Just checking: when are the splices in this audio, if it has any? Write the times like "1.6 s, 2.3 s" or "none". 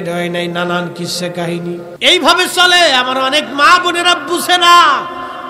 1.9 s